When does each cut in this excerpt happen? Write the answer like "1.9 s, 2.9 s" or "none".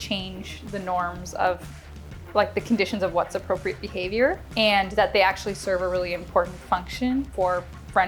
4.5 s, 7.3 s